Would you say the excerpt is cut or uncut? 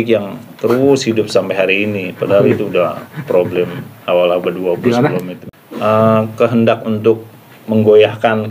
cut